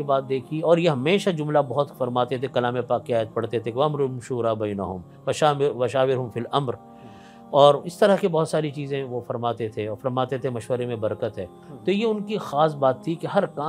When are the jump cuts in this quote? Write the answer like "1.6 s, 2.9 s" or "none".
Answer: none